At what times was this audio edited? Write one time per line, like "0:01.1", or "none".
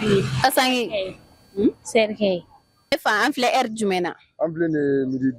0:02.9